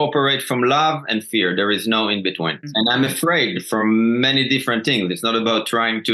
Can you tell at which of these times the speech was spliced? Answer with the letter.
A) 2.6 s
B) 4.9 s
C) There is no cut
A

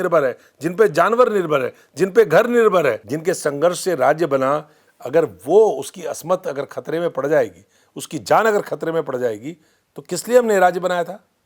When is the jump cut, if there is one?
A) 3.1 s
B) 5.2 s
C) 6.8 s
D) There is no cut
A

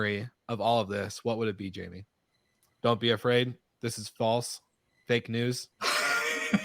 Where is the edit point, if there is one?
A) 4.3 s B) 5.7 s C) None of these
B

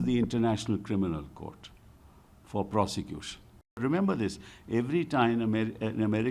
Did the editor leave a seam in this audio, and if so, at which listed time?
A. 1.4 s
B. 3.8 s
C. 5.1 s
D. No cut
B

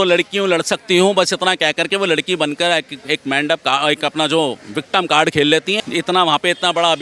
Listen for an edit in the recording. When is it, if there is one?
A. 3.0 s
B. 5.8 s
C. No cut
B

